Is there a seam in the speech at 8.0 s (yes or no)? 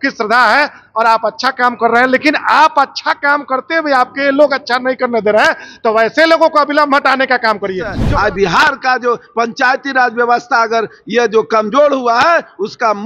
yes